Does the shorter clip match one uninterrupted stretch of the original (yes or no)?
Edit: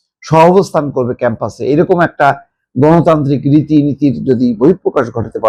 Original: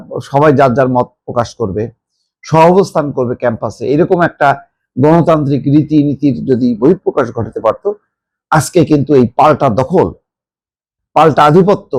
yes